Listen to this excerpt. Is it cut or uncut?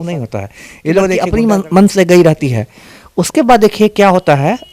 cut